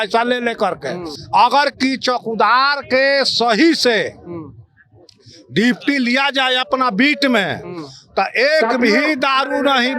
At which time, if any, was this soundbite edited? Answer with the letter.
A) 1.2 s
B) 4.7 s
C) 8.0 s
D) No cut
A